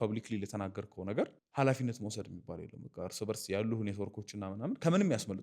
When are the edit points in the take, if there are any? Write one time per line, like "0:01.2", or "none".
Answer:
0:01.4